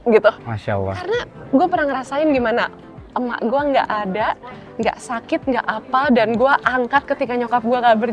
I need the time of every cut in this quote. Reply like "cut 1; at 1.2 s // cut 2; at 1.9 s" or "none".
none